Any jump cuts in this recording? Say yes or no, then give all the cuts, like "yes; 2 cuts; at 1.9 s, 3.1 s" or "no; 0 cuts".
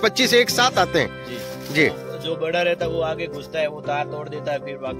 no; 0 cuts